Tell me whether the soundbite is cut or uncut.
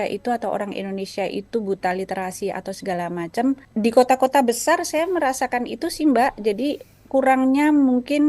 cut